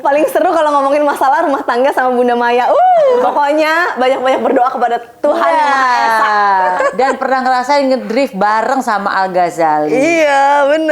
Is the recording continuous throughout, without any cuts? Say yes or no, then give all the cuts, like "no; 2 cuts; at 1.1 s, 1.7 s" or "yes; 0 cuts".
no; 2 cuts; at 3.3 s, 6.8 s